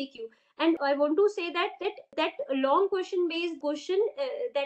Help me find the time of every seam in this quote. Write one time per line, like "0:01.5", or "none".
0:00.8
0:02.1
0:03.6